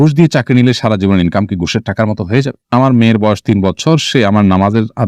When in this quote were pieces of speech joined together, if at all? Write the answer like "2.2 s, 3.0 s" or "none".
2.7 s